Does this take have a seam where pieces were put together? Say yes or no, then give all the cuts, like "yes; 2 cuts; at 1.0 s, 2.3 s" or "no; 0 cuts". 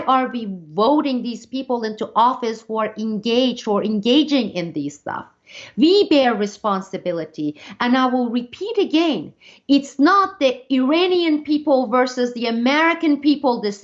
no; 0 cuts